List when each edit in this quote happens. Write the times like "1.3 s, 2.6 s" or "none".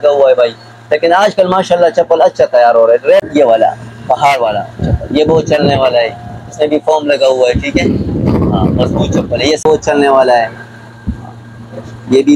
3.3 s, 9.6 s